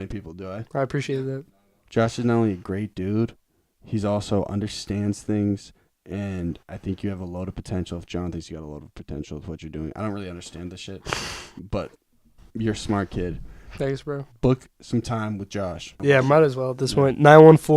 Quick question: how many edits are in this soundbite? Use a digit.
1